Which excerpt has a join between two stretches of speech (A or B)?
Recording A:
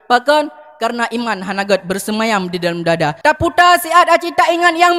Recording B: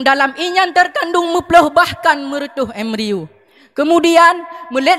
A